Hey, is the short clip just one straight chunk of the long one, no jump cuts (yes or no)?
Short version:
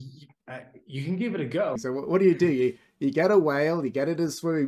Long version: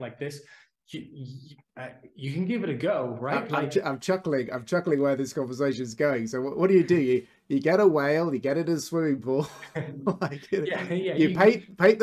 no